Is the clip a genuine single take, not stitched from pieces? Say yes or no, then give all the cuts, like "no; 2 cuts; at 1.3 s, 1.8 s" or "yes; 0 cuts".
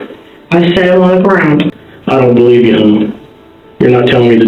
no; 1 cut; at 1.8 s